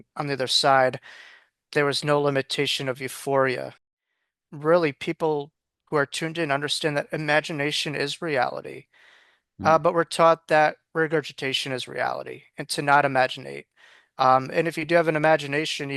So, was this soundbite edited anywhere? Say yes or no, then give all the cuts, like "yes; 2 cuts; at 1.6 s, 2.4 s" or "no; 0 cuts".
yes; 1 cut; at 3.8 s